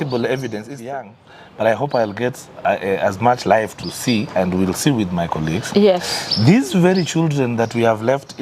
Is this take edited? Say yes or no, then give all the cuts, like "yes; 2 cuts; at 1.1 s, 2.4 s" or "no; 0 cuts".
yes; 1 cut; at 0.9 s